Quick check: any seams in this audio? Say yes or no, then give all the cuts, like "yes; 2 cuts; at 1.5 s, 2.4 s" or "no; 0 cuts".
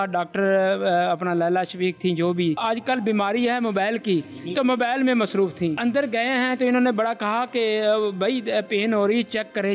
yes; 1 cut; at 2.6 s